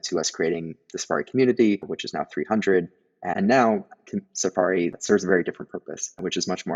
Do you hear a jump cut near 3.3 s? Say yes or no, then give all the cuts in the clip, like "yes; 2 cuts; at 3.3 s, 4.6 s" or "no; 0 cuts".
yes; 1 cut; at 3.3 s